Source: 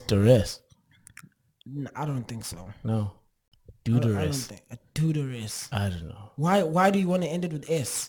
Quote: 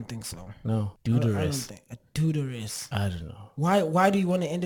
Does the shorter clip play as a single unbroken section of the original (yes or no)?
no